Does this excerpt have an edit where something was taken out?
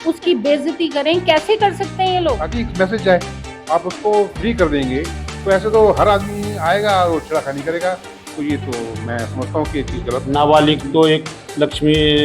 yes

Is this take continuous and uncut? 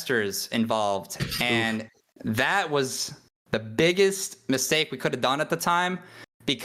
yes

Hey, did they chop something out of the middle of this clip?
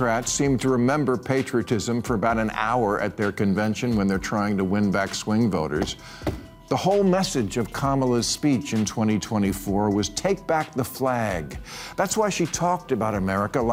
no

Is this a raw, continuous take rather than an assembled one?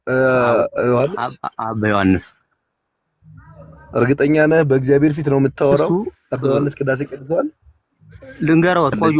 yes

